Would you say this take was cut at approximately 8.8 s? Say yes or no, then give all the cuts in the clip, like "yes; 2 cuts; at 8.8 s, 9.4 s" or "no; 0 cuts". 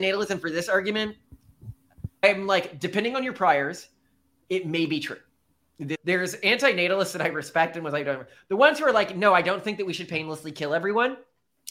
no; 2 cuts; at 2.2 s, 6.0 s